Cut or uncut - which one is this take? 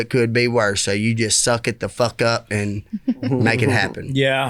uncut